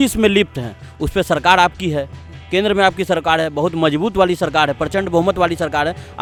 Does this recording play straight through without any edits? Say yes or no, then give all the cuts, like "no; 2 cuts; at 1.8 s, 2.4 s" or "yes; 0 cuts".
yes; 0 cuts